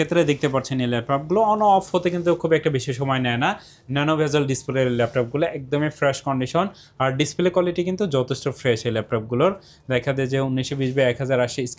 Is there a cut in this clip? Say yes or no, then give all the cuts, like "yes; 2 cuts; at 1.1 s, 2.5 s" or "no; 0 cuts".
no; 0 cuts